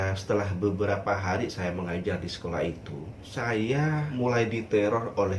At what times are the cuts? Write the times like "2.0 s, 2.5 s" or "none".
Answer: 3.2 s, 4.1 s